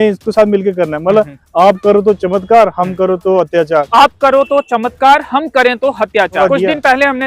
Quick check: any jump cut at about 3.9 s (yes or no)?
yes